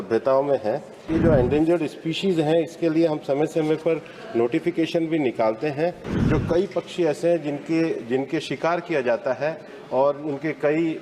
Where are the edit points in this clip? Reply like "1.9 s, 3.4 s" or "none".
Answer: 1.0 s, 6.1 s